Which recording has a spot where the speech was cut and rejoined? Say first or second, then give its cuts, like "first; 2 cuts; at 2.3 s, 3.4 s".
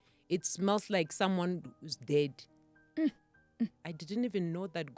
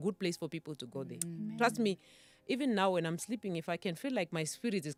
first; 1 cut; at 3.9 s